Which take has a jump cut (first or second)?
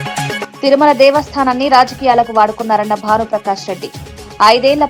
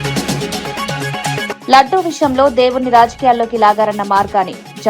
second